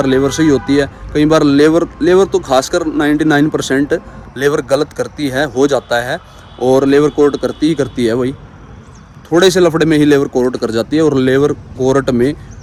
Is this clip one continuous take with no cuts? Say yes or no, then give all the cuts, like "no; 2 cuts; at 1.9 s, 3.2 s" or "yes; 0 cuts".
yes; 0 cuts